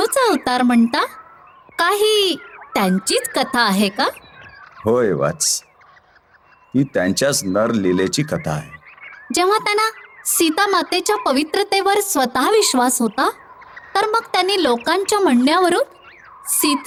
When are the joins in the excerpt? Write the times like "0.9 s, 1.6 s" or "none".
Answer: none